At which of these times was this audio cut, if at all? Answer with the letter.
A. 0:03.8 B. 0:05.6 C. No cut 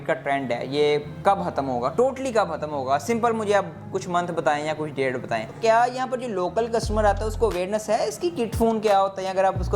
B